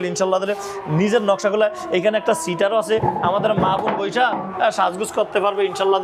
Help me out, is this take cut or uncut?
uncut